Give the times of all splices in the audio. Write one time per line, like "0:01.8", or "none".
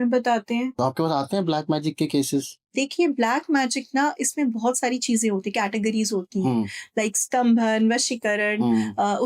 0:00.8
0:02.7